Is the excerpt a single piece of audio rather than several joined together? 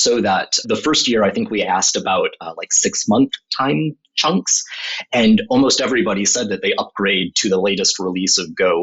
yes; 0 cuts

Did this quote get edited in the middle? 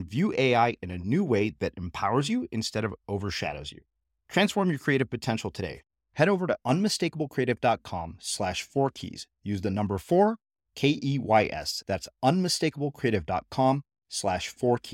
no; 0 cuts

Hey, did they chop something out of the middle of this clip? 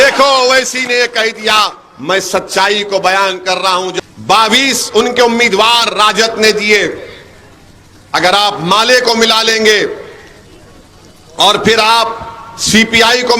yes; 1 cut; at 3.9 s

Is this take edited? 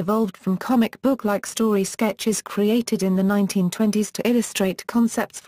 yes; 1 cut; at 4.5 s

